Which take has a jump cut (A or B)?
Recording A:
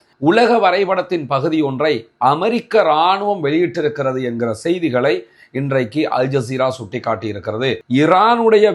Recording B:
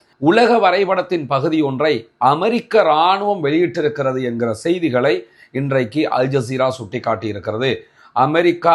A